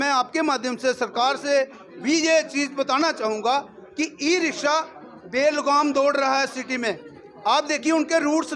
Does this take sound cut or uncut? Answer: uncut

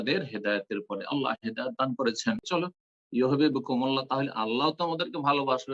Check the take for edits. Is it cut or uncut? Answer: cut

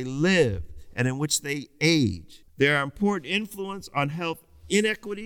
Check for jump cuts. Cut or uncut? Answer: cut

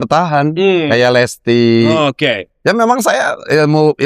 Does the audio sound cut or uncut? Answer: uncut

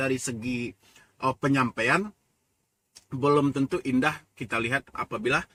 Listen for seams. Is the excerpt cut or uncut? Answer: uncut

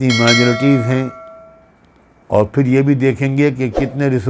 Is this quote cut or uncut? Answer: uncut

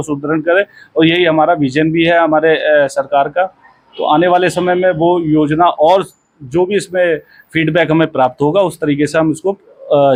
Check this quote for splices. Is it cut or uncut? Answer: uncut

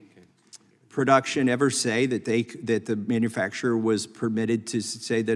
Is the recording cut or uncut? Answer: uncut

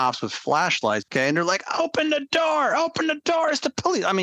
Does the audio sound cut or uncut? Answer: cut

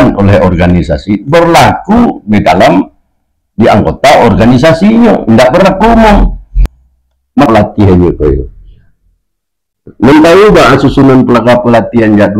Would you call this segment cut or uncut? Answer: cut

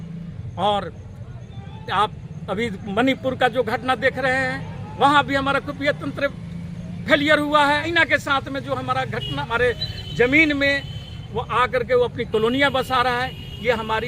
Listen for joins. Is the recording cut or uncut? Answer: cut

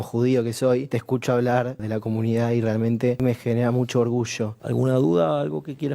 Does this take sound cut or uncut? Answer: cut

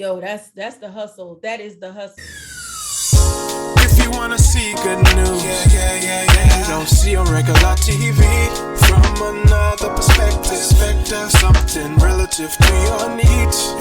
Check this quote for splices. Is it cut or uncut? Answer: cut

